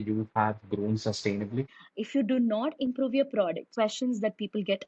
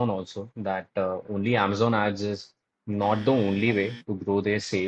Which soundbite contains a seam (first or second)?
first